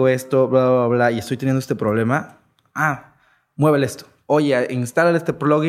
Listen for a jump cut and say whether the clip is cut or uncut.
cut